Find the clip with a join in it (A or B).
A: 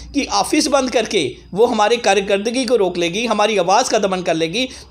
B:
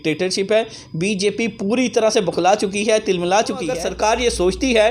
B